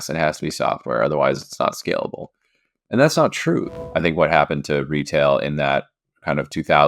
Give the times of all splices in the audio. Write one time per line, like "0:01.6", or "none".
0:03.7